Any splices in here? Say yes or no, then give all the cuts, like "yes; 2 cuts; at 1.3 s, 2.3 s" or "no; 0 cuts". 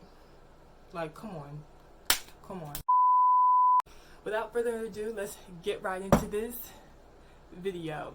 yes; 2 cuts; at 2.8 s, 3.8 s